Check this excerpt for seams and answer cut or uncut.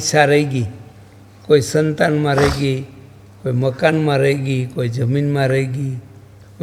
uncut